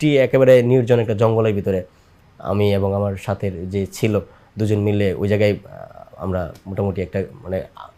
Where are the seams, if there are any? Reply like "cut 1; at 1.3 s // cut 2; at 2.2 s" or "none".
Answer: none